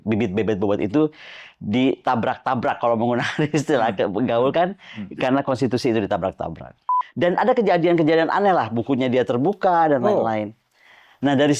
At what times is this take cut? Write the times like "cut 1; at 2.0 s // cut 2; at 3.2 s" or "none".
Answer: cut 1; at 6.9 s